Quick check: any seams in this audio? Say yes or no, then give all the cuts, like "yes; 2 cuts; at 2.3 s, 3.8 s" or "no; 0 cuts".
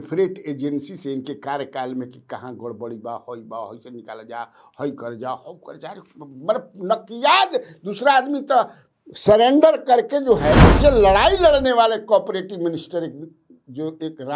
yes; 1 cut; at 10.7 s